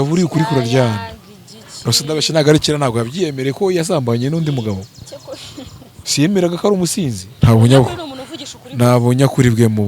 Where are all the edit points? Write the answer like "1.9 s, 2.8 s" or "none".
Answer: 7.2 s